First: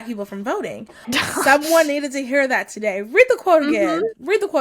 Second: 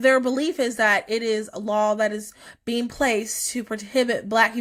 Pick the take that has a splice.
first; 1 cut; at 1.1 s

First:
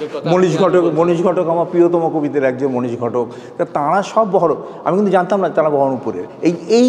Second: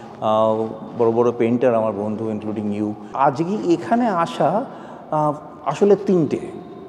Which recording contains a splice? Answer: second; 1 cut; at 3.0 s

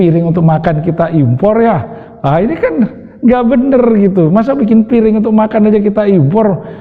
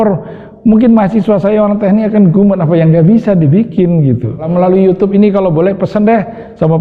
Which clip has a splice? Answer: second; 1 cut; at 4.4 s

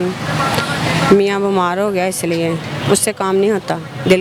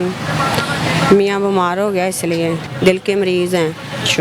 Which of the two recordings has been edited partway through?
second; 1 cut; at 2.7 s

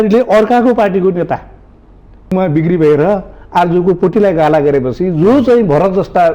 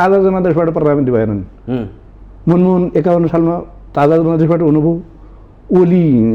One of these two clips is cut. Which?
first; 1 cut; at 2.3 s

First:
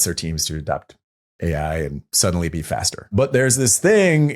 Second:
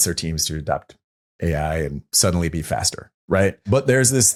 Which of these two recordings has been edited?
first; 1 cut; at 3.1 s

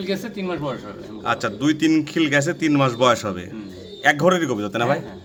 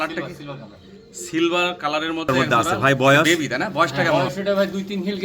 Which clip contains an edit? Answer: second; 3 cuts; at 2.2 s, 3.2 s, 4.1 s

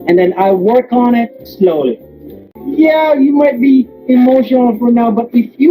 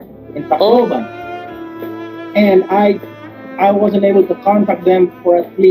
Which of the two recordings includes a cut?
first; 1 cut; at 2.5 s

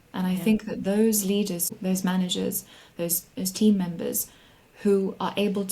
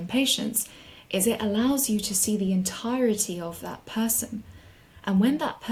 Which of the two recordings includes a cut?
first; 1 cut; at 1.7 s

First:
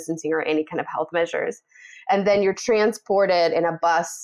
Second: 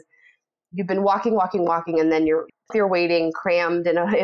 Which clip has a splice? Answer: second; 1 cut; at 2.7 s

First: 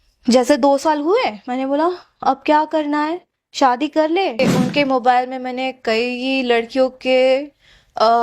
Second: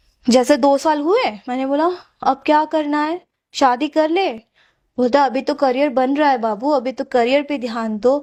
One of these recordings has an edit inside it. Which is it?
first; 1 cut; at 4.4 s

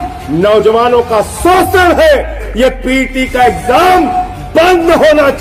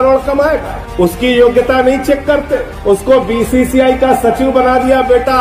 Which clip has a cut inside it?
first; 1 cut; at 2.4 s

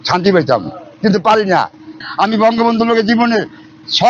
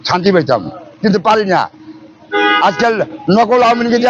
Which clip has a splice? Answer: first; 1 cut; at 2.0 s

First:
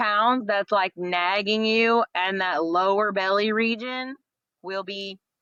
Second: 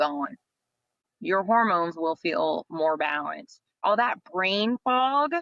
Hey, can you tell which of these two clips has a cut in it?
second; 2 cuts; at 1.1 s, 3.8 s

